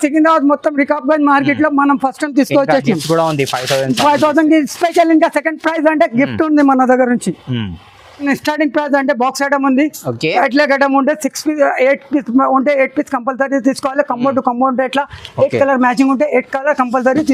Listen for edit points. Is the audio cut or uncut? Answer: uncut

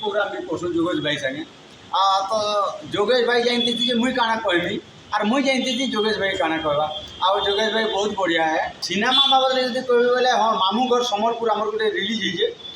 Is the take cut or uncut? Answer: cut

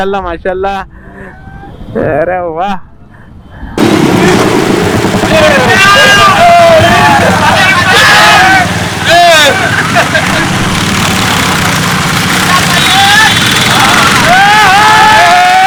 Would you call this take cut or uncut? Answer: uncut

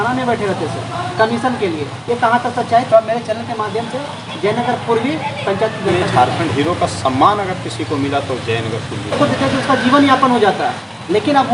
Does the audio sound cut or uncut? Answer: cut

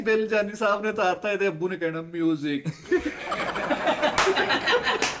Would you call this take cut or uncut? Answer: uncut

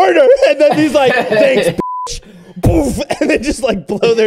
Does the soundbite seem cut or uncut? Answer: uncut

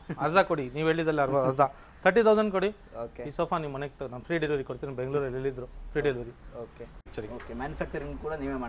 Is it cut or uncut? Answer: cut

